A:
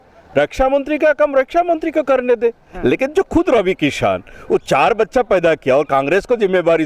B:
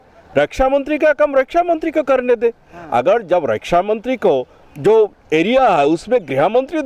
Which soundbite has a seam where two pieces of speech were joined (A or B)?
A